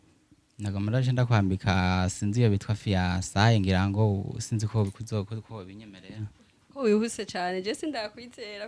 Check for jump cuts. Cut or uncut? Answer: uncut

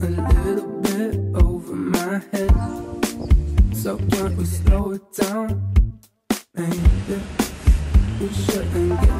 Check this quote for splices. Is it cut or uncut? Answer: uncut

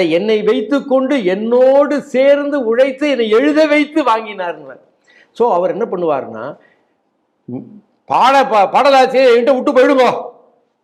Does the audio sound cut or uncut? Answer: uncut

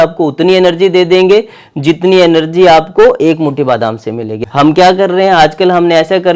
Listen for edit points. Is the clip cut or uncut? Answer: cut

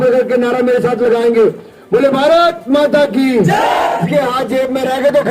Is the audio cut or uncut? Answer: cut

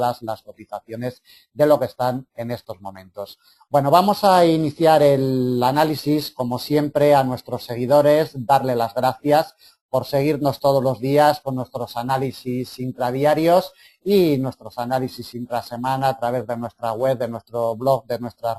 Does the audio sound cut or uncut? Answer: cut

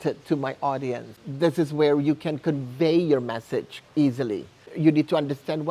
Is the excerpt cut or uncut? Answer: cut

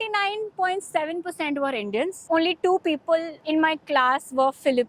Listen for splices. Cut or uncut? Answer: cut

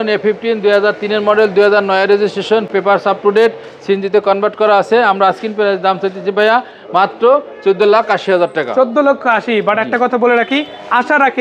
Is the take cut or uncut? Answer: uncut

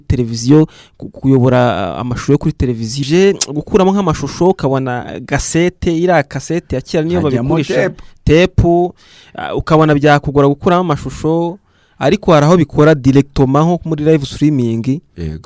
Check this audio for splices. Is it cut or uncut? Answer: cut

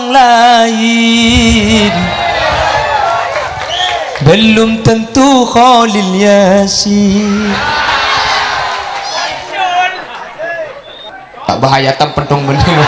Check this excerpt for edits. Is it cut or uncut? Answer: cut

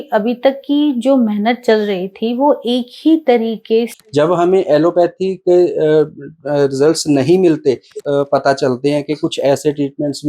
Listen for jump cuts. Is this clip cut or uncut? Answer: cut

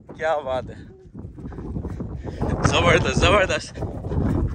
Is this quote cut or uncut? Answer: uncut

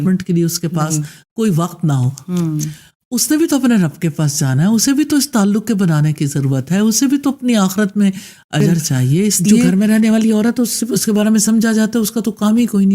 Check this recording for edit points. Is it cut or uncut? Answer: cut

